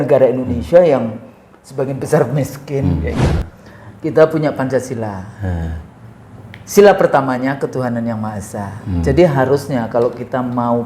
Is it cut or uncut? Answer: cut